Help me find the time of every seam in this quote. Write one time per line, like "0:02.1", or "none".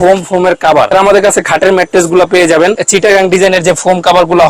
0:00.9
0:02.8